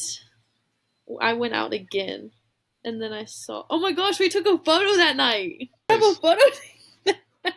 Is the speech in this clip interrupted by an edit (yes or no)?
yes